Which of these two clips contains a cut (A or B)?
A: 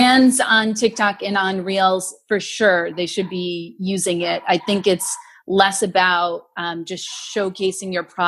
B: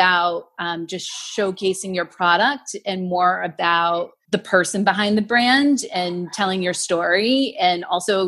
B